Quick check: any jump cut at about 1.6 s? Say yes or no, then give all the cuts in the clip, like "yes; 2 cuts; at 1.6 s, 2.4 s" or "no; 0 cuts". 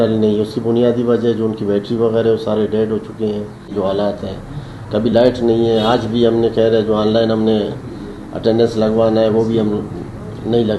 no; 1 cut; at 3.7 s